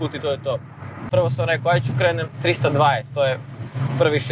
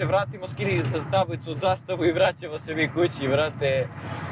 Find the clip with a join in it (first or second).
first